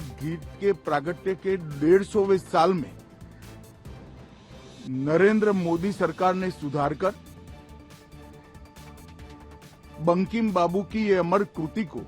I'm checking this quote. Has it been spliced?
yes; 4 cuts; at 3.1 s, 4.8 s, 7.8 s, 9.7 s

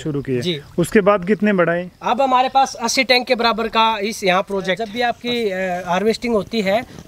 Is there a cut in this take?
yes; 1 cut; at 4.9 s

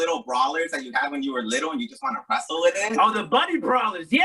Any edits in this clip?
no; 0 cuts

